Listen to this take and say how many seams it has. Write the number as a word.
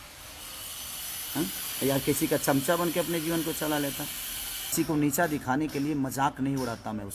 one